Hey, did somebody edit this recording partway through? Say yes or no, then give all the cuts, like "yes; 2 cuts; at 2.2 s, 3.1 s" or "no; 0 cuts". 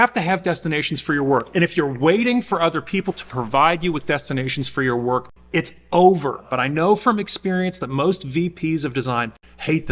yes; 1 cut; at 6.5 s